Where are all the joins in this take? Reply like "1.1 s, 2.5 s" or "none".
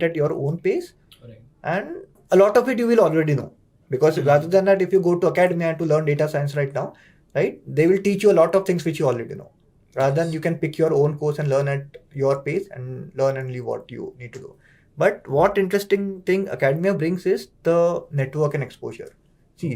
none